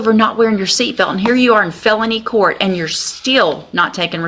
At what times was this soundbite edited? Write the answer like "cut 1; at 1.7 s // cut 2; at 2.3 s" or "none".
none